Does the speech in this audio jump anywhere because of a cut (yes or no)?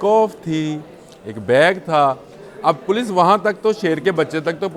no